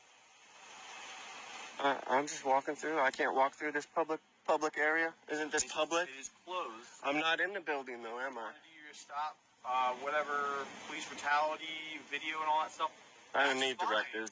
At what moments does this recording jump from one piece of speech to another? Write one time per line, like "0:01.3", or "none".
0:01.6